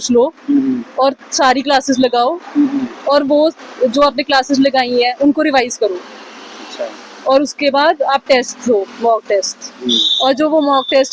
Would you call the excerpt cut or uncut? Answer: uncut